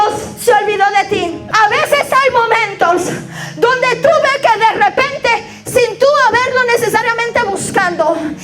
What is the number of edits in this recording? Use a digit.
1